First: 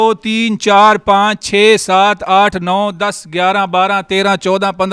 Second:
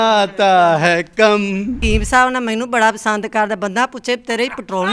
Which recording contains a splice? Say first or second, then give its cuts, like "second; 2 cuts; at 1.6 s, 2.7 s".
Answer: second; 1 cut; at 1.8 s